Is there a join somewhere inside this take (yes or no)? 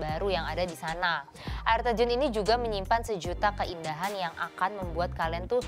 no